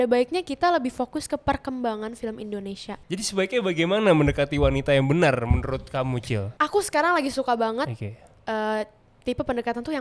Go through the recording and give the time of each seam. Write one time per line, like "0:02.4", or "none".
0:02.9
0:06.5